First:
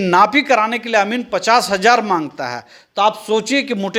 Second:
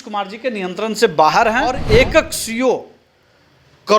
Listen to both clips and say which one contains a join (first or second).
second